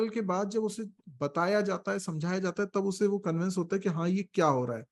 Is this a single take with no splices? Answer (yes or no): yes